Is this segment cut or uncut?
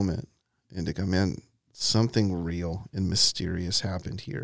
uncut